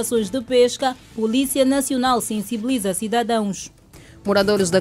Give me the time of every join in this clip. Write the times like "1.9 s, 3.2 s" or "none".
none